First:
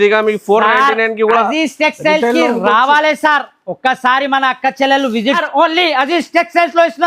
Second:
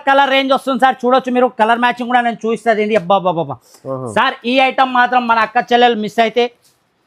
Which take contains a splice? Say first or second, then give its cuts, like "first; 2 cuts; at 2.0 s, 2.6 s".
first; 1 cut; at 5.4 s